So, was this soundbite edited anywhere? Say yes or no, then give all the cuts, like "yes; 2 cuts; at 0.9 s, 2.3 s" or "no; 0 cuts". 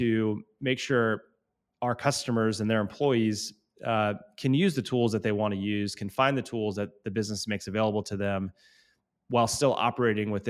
no; 0 cuts